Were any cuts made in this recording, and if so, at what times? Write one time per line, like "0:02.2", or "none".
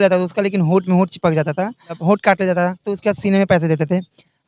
0:01.9
0:02.9